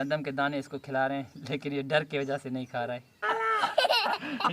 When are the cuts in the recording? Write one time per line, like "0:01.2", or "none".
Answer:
0:03.1